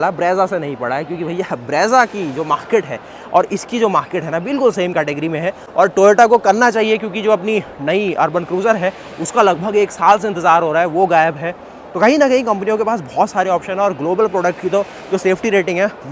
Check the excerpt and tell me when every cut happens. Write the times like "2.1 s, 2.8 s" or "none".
none